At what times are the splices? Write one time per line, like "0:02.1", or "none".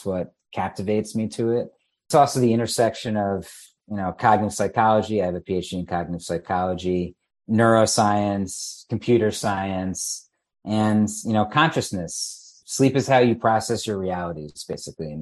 none